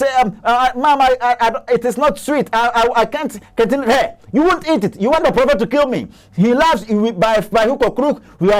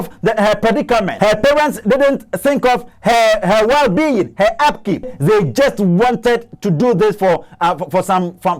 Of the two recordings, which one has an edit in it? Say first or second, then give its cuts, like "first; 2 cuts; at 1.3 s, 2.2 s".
second; 2 cuts; at 1.1 s, 5.1 s